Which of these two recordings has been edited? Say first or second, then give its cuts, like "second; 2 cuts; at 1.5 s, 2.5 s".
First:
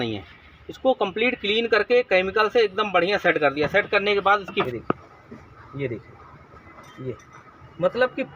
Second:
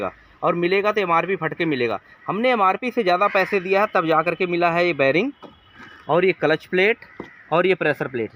first; 1 cut; at 4.7 s